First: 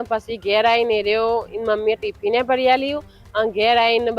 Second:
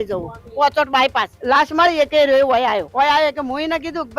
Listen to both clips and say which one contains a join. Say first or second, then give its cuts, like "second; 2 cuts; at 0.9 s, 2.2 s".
second; 2 cuts; at 1.3 s, 2.9 s